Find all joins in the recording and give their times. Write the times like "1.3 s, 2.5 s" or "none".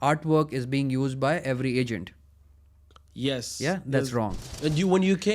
4.4 s